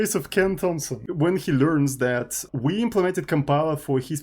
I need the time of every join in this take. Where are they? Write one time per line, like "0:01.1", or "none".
0:01.0
0:02.5